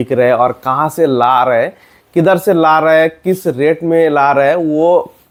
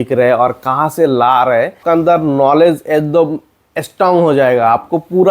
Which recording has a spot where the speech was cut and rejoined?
second; 1 cut; at 1.8 s

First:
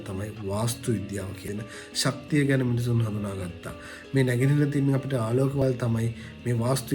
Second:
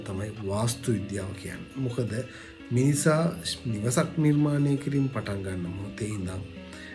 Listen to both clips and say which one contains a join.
first; 2 cuts; at 1.5 s, 5.6 s

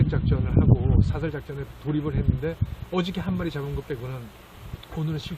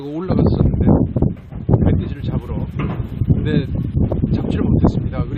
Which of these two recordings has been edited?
second; 1 cut; at 3.1 s

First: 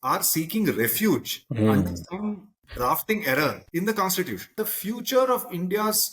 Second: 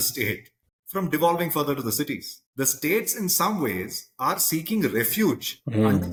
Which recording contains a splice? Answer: first; 2 cuts; at 3.6 s, 4.5 s

